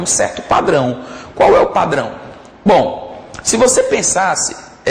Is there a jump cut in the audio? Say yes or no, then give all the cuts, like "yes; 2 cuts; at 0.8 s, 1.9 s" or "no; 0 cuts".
yes; 1 cut; at 1.2 s